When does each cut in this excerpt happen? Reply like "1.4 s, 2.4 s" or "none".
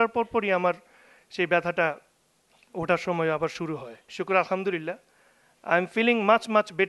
4.0 s